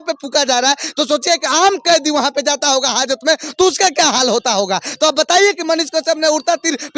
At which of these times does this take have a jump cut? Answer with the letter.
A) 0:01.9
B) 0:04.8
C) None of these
C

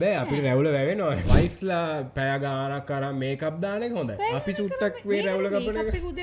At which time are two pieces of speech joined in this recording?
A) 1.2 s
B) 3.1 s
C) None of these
A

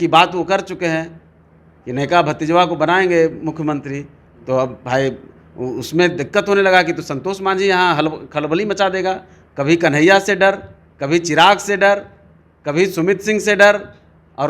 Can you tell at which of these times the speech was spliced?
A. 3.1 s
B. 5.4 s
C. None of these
C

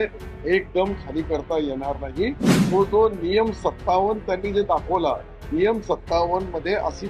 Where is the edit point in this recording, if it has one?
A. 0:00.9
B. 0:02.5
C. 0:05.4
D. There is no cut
B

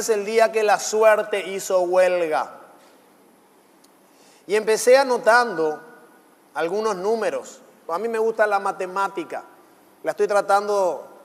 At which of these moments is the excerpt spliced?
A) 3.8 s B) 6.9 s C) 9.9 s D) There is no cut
B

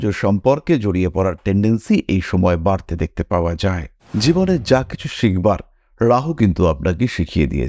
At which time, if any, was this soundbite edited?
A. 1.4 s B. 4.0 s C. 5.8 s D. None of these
B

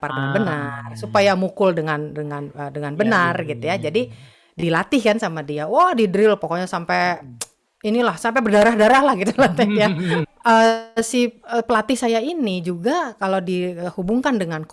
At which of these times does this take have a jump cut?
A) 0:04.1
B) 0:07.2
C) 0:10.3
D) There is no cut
C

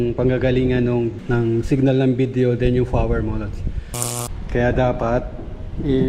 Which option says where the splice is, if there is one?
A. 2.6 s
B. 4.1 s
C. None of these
B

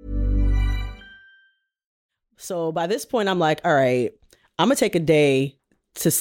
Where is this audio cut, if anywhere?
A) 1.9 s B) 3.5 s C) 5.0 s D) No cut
A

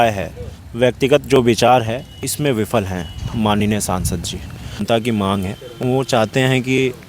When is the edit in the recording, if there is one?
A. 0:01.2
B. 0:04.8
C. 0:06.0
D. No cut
B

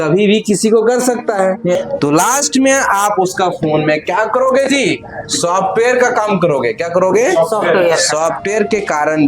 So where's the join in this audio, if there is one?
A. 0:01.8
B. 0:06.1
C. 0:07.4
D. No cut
A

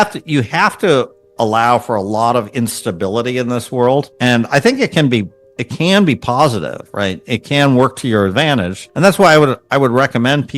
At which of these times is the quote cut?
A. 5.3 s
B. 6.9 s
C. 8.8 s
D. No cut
C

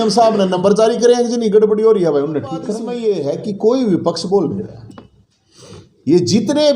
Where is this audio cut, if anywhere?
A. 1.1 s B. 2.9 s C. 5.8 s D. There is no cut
B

